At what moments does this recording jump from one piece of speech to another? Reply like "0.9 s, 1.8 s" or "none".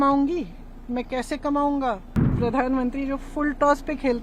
2.4 s